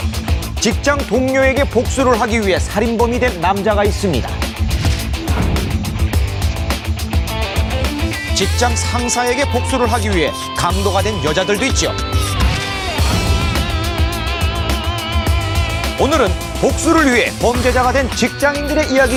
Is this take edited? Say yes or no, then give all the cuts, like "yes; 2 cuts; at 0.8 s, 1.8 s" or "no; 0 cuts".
no; 0 cuts